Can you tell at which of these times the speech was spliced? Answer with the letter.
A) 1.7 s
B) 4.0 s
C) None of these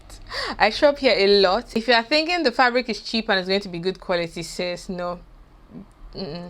A